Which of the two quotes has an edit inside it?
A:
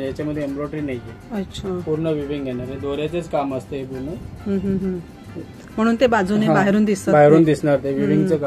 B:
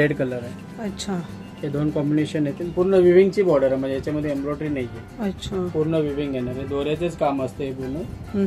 B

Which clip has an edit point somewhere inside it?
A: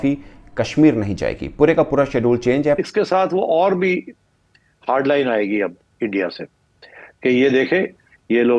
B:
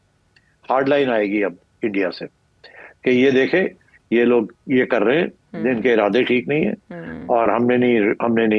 A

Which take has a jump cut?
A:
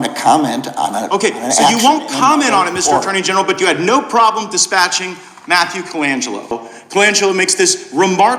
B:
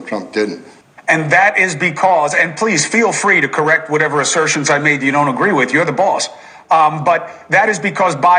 A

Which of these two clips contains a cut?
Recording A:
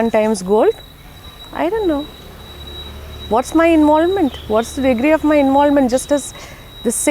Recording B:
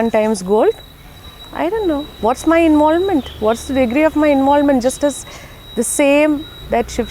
B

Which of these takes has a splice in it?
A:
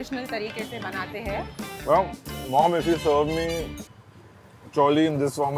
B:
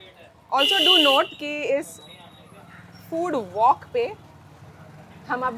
A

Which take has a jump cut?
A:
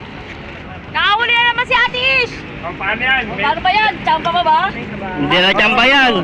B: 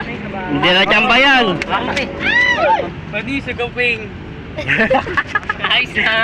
B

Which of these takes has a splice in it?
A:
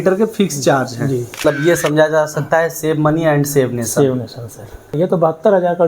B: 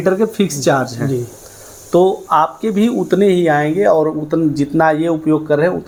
A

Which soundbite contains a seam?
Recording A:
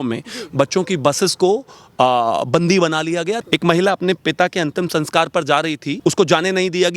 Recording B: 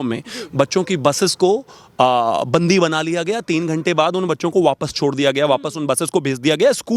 A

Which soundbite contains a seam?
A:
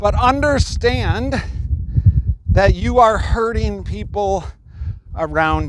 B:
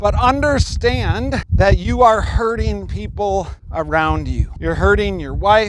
B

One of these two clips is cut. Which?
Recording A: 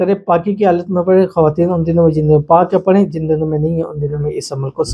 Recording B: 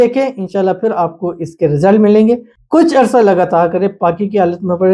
B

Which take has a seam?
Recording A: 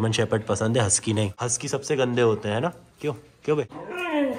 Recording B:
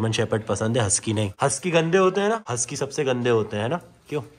A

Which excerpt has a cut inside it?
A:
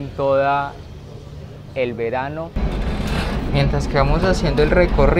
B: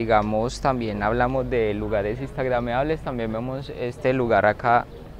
A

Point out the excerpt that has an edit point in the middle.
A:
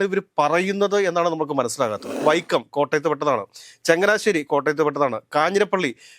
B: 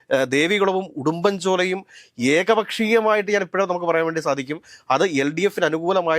A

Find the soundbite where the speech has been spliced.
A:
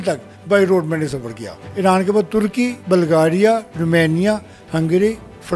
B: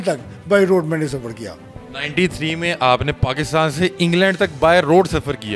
A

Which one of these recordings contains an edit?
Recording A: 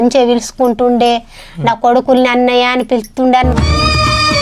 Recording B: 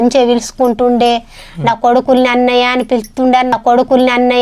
A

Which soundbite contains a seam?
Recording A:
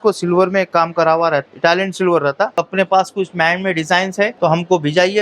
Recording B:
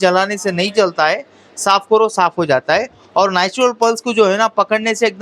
A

